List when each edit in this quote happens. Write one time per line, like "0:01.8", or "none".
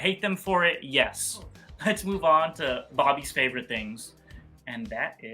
0:01.6